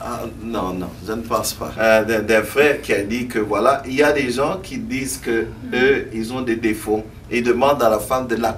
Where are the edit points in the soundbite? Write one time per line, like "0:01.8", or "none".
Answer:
0:01.7